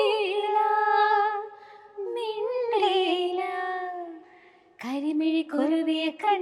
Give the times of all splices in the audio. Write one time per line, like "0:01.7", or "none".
none

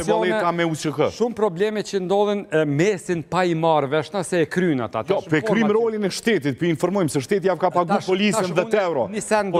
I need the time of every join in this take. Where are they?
none

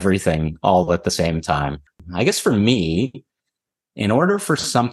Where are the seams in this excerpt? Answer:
0:02.0

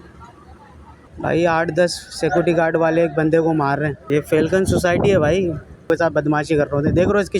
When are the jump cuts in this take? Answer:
0:01.0
0:04.0
0:05.9

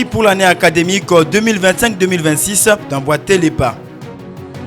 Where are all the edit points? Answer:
0:03.7

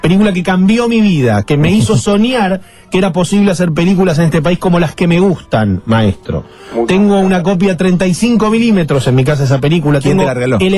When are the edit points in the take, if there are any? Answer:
none

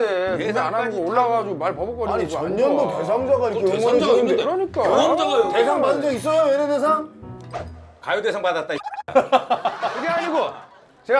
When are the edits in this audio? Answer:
0:10.0

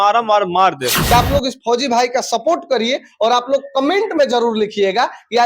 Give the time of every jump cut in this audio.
0:00.9

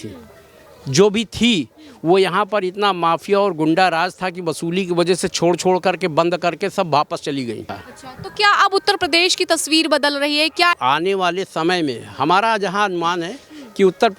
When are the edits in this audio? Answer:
0:07.7
0:10.8

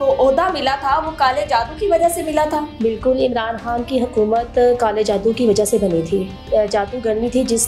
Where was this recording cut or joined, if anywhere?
0:02.7
0:06.4

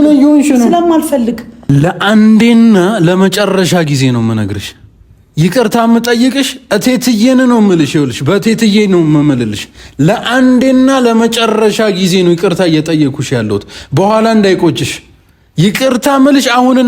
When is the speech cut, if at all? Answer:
0:01.5

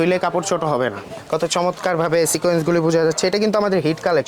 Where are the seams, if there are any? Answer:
0:01.1

